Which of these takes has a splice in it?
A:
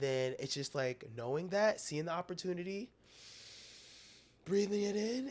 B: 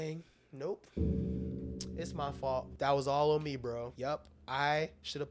B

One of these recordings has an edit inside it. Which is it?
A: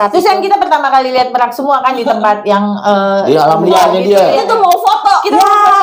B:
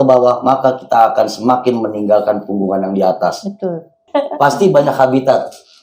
B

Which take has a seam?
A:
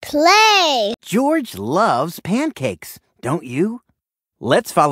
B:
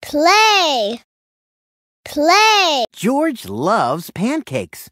A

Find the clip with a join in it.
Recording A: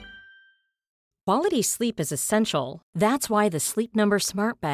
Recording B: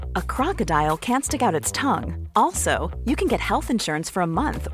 A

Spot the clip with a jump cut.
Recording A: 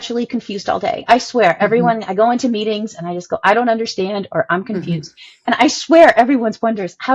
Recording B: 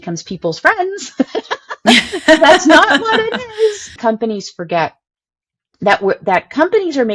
B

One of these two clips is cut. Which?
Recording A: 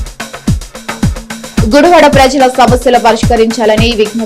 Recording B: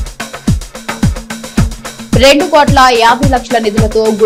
A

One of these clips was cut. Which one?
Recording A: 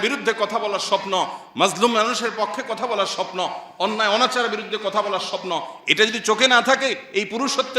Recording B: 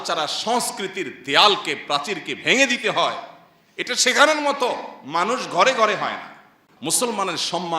B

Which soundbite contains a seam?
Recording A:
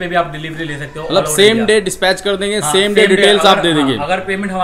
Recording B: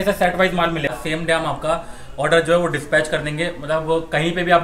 B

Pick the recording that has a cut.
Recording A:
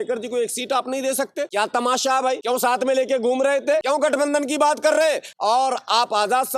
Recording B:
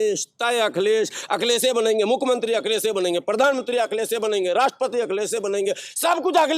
A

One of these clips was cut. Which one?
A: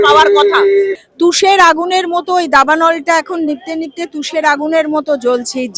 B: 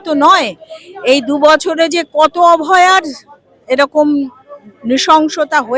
A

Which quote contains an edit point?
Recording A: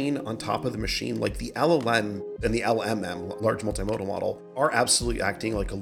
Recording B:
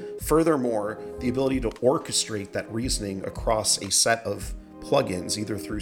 A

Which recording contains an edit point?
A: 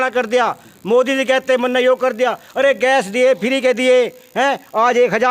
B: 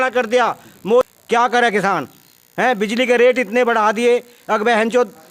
B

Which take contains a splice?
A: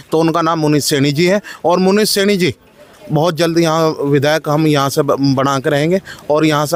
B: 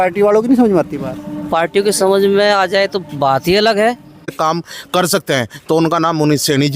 B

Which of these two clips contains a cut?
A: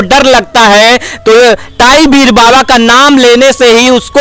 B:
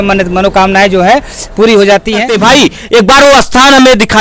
B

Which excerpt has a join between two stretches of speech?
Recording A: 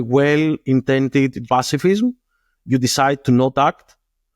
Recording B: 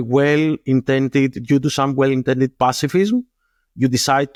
A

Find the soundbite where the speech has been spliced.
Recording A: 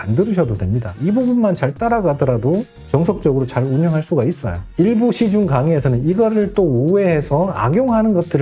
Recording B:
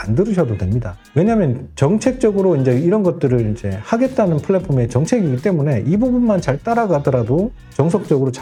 A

